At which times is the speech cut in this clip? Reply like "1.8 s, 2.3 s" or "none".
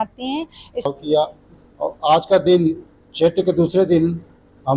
0.9 s